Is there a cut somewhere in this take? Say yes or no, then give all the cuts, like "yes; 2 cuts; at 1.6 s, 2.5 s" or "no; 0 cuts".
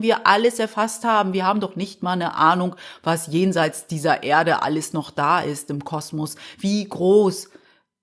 no; 0 cuts